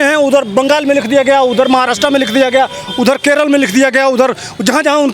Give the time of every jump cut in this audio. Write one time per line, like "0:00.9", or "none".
none

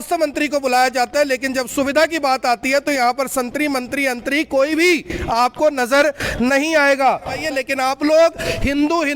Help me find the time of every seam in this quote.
0:07.3

